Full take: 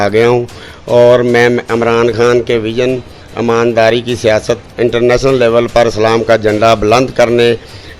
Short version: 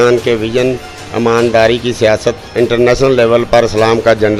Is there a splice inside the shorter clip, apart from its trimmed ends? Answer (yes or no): no